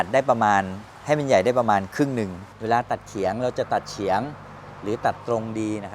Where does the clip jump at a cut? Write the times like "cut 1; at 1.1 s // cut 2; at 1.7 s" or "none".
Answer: cut 1; at 2.5 s